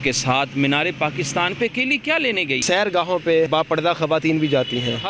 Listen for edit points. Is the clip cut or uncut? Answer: cut